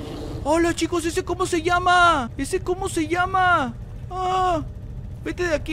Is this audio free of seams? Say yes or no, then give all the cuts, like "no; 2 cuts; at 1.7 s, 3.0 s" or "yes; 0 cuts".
yes; 0 cuts